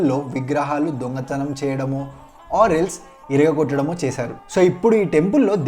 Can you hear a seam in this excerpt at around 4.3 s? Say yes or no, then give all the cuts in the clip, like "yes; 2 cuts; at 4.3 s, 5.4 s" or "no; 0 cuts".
yes; 1 cut; at 4.3 s